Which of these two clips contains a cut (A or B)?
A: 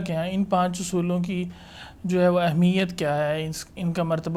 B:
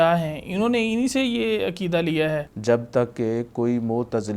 B